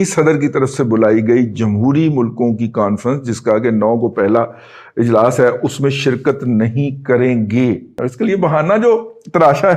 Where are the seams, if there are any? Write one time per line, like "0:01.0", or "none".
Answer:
0:08.0